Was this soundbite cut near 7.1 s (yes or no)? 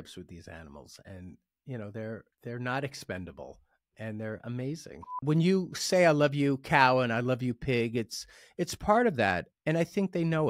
no